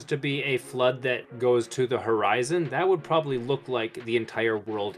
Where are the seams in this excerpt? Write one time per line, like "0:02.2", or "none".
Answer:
0:01.3